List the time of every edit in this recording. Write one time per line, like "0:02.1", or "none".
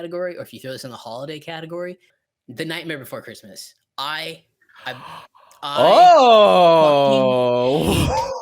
0:02.1